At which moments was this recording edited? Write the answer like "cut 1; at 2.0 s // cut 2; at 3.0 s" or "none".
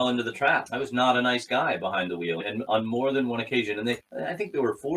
none